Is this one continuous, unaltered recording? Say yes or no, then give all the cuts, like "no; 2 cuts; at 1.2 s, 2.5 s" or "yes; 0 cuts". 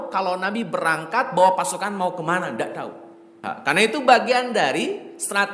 no; 1 cut; at 3.5 s